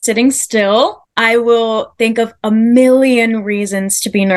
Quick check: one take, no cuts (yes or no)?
yes